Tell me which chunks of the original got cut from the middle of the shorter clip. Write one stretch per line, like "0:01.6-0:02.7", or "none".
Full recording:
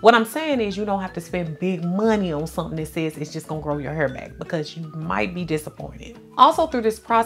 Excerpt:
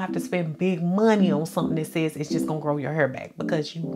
none